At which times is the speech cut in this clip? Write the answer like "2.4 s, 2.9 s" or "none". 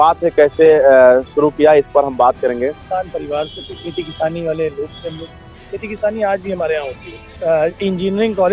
2.8 s, 7.2 s